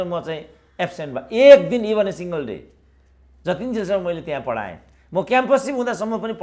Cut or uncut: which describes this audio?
uncut